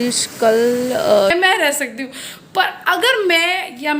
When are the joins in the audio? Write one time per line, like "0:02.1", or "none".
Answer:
0:01.3

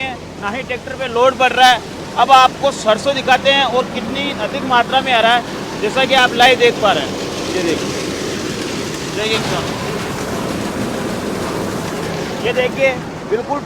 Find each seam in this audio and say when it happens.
none

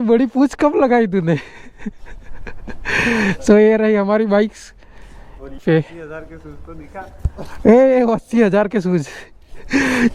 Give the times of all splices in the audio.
0:05.6

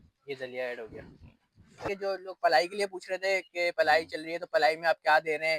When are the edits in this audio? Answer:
0:01.8

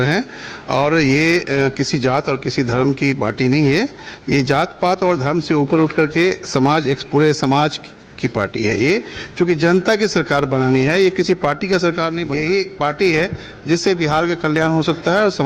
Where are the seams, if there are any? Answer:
0:12.2

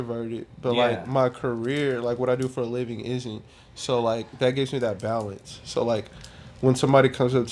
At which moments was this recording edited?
none

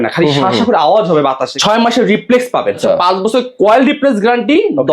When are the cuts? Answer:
0:01.5
0:02.8

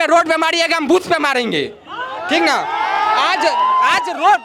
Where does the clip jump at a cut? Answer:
none

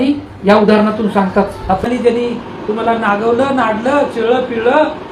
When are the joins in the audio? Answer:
0:01.9

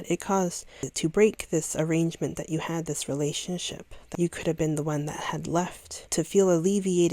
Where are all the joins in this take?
0:00.9
0:03.9
0:06.1

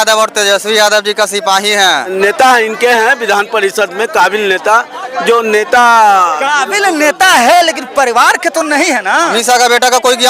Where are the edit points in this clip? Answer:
0:02.1
0:09.4

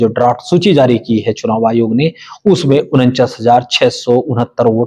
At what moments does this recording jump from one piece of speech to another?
none

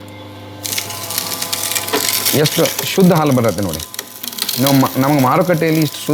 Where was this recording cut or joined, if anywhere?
none

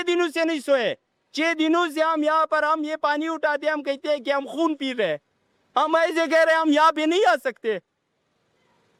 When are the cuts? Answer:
none

